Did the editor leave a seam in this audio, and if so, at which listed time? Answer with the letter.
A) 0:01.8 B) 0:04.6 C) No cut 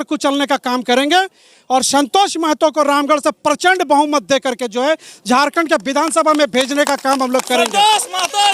C